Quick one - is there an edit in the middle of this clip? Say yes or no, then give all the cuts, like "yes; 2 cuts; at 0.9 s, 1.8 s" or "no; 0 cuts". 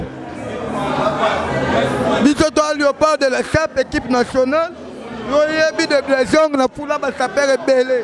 no; 0 cuts